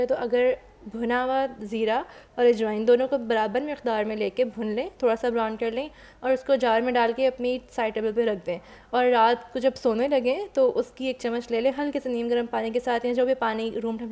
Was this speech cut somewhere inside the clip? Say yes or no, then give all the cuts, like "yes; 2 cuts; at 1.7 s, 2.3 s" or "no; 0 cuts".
no; 0 cuts